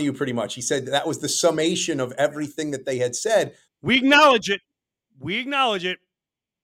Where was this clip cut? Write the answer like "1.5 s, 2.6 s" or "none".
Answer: 3.6 s